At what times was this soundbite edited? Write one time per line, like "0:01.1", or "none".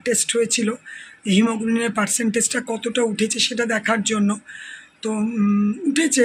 none